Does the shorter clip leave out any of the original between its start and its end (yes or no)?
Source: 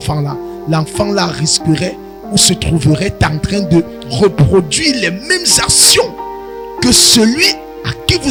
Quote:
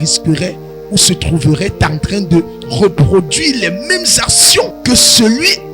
yes